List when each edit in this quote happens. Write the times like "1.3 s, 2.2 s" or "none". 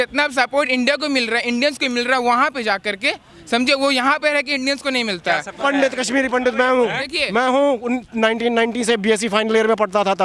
5.6 s